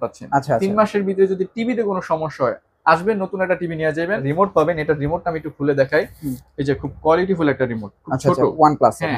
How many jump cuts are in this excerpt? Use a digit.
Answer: 1